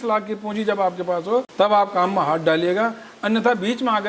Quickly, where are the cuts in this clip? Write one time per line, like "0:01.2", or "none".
0:01.5